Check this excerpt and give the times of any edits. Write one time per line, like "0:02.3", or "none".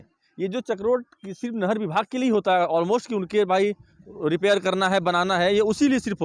none